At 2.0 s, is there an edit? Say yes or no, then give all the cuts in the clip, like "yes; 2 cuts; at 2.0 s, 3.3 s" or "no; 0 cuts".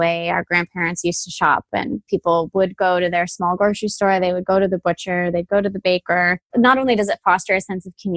yes; 1 cut; at 2.0 s